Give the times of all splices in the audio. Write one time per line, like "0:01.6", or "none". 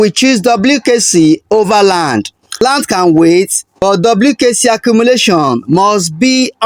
0:02.6